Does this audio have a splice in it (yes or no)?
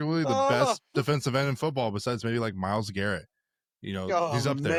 no